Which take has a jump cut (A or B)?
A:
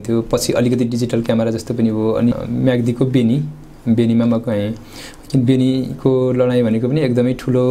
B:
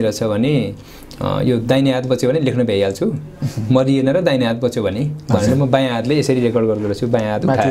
A